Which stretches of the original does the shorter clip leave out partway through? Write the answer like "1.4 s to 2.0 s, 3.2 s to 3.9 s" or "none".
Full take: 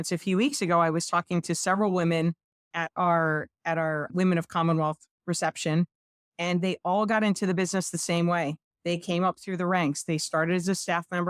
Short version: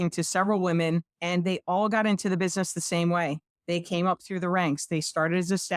2.5 s to 6.3 s